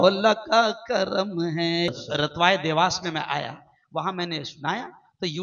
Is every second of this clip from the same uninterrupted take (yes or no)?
no